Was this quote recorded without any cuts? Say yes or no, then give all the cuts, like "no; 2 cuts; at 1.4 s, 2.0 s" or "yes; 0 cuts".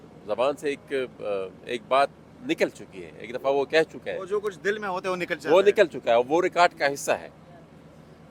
yes; 0 cuts